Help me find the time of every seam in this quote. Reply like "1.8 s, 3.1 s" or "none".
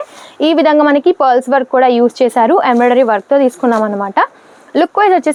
none

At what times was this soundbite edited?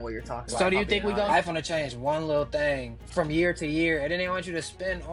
1.3 s, 3.0 s

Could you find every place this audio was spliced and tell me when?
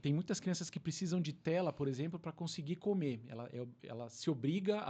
none

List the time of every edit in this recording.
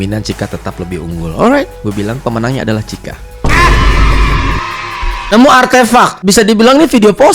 5.3 s, 6.2 s

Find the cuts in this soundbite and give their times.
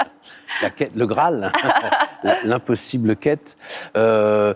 none

